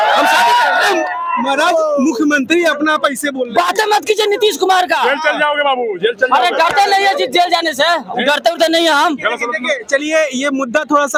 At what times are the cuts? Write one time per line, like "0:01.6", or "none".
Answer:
none

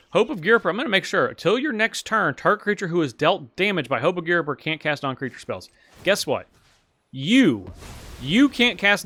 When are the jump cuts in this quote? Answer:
none

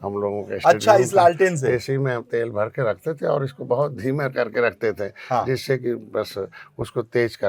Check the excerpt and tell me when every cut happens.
none

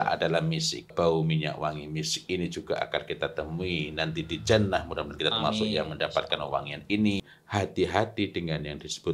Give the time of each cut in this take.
0:00.9
0:07.3

